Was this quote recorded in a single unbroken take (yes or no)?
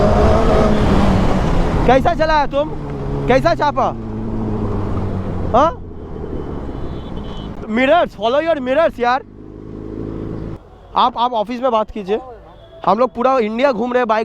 no